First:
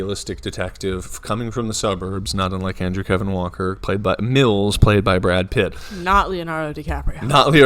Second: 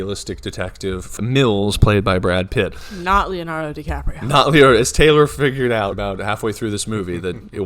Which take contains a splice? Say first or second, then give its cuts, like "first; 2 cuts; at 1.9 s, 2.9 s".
second; 2 cuts; at 1.2 s, 5.9 s